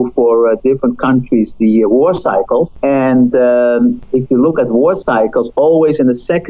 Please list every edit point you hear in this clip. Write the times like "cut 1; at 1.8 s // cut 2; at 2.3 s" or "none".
cut 1; at 2.7 s // cut 2; at 4.0 s